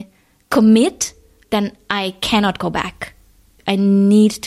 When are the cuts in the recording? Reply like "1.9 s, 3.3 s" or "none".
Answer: 1.3 s, 3.5 s

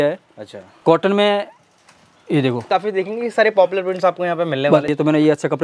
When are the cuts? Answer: 2.7 s, 4.9 s

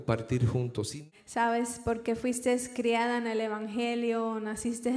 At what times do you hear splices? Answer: 1.0 s

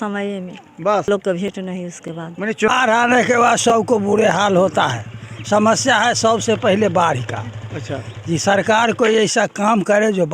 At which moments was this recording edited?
1.1 s, 2.7 s

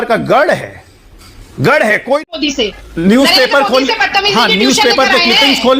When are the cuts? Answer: 2.3 s

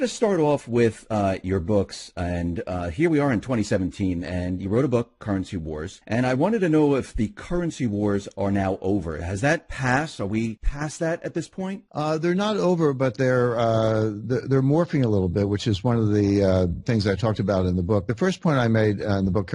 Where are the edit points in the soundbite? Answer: 8.8 s

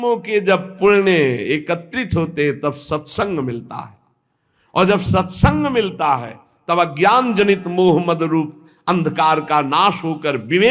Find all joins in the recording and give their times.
none

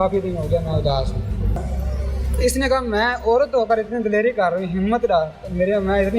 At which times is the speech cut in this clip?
1.6 s

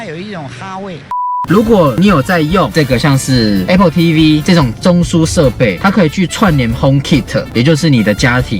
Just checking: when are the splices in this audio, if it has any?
1.4 s

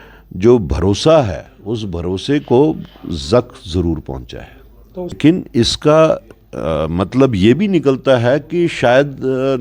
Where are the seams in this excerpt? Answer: 5.2 s

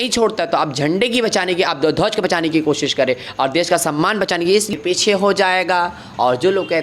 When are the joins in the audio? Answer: 4.7 s

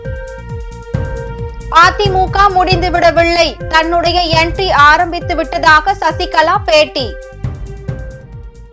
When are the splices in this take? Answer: 1.1 s

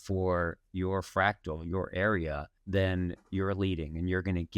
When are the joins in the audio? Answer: 2.5 s

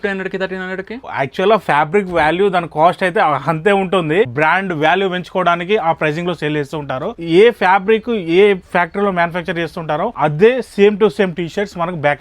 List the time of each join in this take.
1.1 s, 4.3 s, 7.2 s, 10.1 s

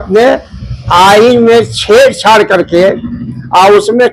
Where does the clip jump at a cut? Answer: none

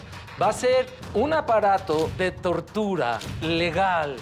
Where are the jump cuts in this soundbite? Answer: 1.0 s, 2.1 s, 3.3 s

